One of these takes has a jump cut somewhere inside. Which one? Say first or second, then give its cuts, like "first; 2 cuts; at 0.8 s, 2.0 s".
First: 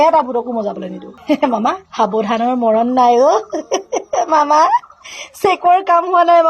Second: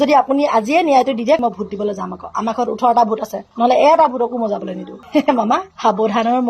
second; 1 cut; at 1.4 s